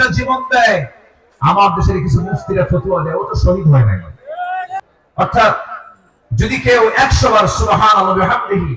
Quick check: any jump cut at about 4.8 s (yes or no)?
yes